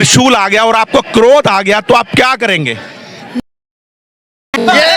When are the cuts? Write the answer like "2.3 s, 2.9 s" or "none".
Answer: none